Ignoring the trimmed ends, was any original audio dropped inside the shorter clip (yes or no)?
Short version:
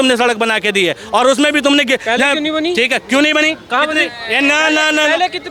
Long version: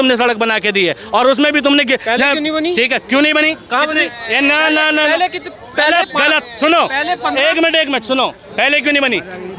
no